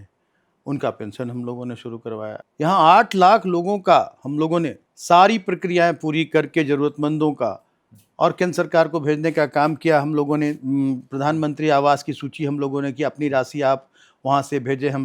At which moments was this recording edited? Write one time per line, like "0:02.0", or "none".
0:02.4
0:04.9